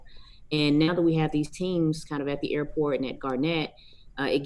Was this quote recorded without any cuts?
yes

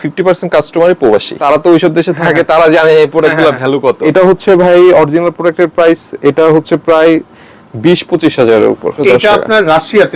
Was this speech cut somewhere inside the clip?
yes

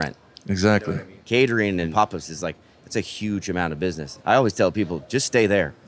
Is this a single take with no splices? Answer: no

